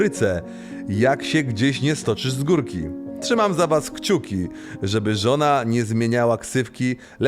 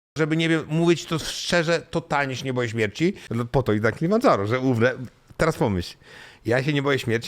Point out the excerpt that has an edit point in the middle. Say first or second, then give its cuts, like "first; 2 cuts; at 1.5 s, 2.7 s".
second; 1 cut; at 3.2 s